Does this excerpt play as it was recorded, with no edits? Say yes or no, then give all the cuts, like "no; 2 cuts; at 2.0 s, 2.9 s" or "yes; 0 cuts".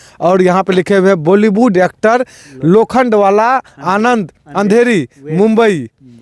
yes; 0 cuts